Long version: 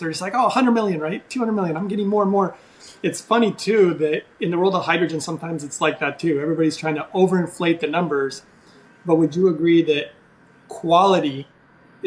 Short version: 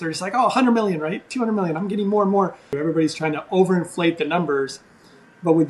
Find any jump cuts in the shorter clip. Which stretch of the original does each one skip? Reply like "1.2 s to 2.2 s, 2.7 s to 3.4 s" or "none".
2.8 s to 6.4 s